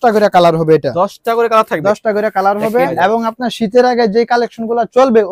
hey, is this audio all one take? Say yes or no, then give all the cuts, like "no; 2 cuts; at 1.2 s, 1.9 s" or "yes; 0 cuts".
no; 1 cut; at 2.9 s